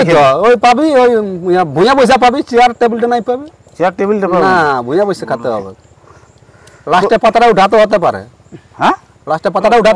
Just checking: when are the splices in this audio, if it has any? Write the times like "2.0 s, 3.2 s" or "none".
none